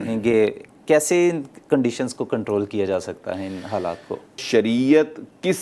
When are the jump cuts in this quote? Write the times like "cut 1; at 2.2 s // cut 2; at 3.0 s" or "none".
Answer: cut 1; at 4.4 s